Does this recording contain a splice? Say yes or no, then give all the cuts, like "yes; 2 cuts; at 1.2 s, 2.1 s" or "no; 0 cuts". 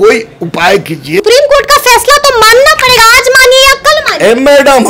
yes; 1 cut; at 1.2 s